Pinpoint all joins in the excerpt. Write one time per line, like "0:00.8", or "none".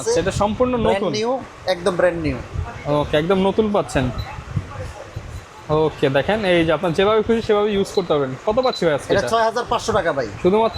none

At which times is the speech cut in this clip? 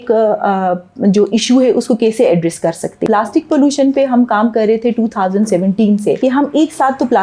0:03.0
0:06.2

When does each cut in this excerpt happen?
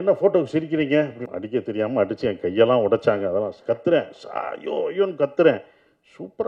0:01.3

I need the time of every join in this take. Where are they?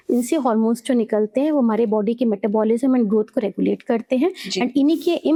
none

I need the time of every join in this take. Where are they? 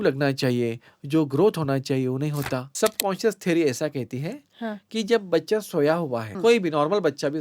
0:02.6
0:06.3

